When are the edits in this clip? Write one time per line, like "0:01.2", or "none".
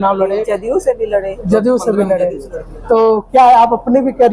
none